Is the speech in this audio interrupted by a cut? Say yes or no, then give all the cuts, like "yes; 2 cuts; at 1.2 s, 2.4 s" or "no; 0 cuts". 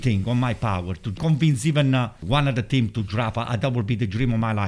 yes; 2 cuts; at 1.2 s, 2.2 s